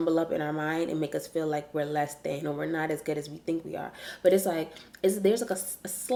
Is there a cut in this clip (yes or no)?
no